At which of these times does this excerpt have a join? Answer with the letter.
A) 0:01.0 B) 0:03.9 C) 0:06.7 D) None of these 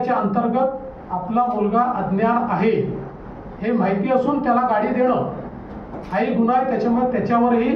D